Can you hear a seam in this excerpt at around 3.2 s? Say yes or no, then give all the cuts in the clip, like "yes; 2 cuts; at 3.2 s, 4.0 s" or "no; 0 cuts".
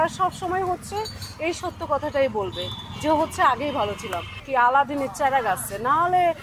no; 1 cut; at 4.4 s